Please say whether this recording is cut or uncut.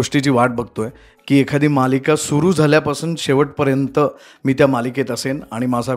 uncut